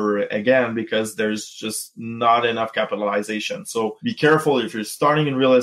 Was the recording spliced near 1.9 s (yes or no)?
no